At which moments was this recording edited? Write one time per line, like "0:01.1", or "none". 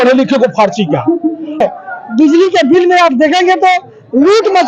0:01.6